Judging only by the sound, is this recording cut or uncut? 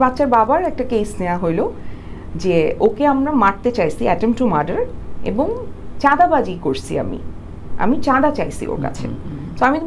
uncut